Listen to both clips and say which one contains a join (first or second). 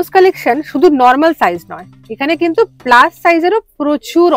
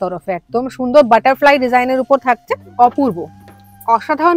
second